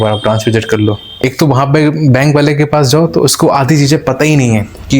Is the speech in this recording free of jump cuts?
no; 1 cut; at 1.1 s

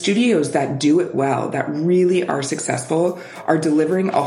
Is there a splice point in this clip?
no; 0 cuts

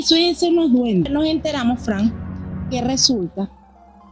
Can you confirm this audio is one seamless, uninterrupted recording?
no; 1 cut; at 1.1 s

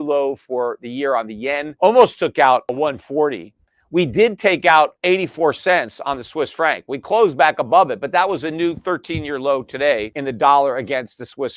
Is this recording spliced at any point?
yes; 4 cuts; at 1.7 s, 2.7 s, 5.0 s, 10.1 s

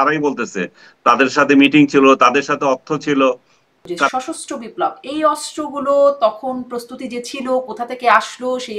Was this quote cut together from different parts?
yes; 1 cut; at 4.1 s

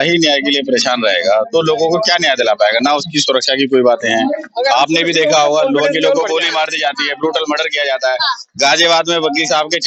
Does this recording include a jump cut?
no; 0 cuts

